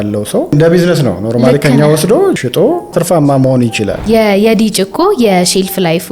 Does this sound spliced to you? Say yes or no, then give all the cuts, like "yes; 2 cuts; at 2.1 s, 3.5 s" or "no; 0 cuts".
yes; 1 cut; at 4.0 s